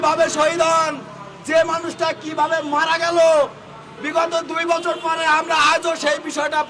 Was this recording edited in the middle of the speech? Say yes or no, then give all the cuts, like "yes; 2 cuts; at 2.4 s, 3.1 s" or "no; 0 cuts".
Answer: no; 0 cuts